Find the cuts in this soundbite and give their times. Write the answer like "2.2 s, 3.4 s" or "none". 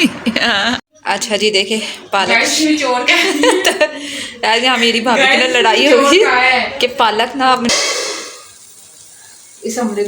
0.9 s, 7.7 s